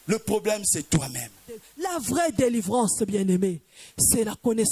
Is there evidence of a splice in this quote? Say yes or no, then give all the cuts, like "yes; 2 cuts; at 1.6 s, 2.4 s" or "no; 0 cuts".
yes; 1 cut; at 1.8 s